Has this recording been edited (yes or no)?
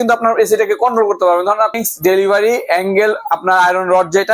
yes